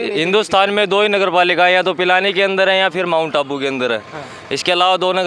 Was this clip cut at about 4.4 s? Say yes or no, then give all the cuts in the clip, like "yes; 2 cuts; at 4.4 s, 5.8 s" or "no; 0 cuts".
no; 0 cuts